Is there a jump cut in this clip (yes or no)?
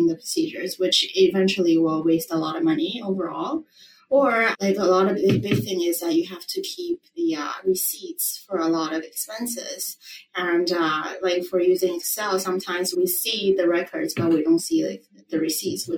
no